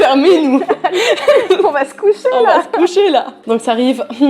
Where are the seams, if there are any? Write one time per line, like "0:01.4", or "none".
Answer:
0:03.4